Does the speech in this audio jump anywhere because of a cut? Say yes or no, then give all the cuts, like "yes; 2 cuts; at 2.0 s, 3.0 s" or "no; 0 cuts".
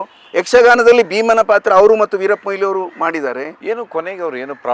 yes; 1 cut; at 3.6 s